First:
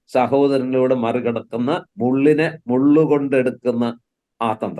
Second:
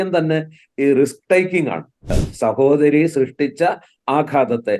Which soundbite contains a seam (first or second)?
second